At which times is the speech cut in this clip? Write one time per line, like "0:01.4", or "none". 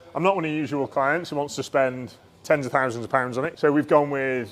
0:03.5